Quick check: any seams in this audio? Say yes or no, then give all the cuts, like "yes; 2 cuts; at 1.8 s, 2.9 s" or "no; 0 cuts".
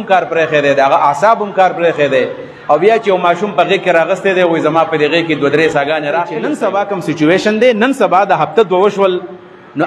yes; 1 cut; at 6.4 s